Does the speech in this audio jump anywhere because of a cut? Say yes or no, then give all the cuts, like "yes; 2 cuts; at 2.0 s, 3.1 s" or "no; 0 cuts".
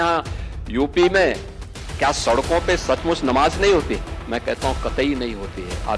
no; 0 cuts